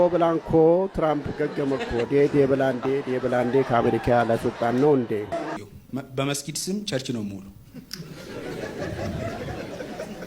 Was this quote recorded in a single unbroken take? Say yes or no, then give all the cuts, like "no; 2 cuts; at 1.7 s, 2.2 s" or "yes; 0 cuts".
no; 1 cut; at 5.6 s